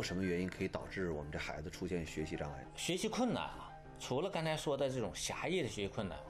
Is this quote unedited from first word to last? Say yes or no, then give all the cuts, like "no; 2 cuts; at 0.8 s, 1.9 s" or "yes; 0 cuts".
no; 1 cut; at 2.7 s